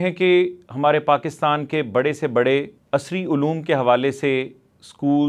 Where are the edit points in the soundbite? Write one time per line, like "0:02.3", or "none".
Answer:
0:02.8